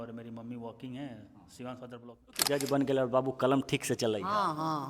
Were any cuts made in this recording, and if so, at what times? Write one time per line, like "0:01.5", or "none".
0:02.4